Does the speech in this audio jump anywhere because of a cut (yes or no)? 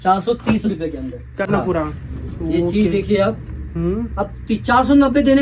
yes